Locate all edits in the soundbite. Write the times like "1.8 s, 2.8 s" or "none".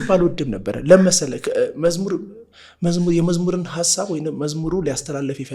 none